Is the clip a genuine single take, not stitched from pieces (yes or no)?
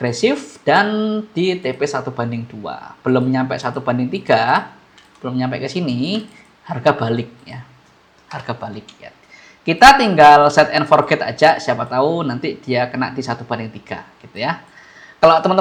yes